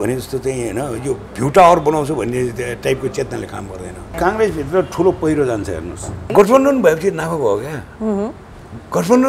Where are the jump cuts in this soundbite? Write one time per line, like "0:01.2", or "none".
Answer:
0:04.1
0:06.3

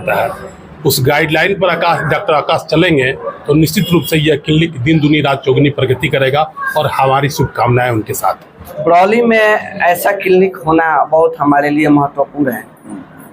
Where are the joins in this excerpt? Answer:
0:08.8

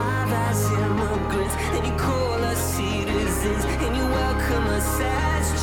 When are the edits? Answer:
none

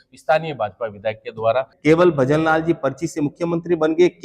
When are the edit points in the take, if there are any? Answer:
0:01.7

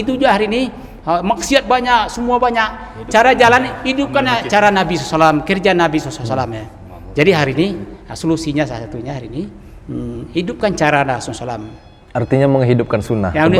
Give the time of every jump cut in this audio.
none

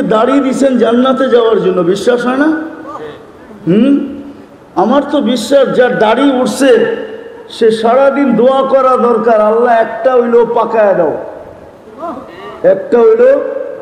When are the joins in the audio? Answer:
none

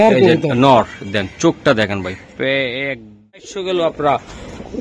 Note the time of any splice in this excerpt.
0:03.4

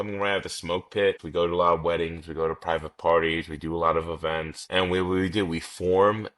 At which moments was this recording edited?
0:01.2
0:04.6

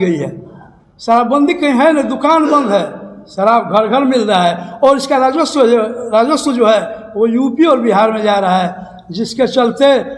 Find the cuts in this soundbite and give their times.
none

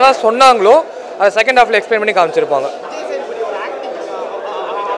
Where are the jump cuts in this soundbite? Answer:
none

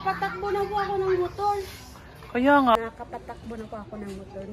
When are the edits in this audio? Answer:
0:02.8

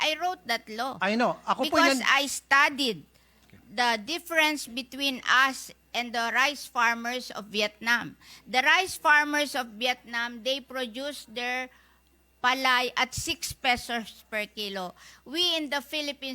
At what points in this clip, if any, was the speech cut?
none

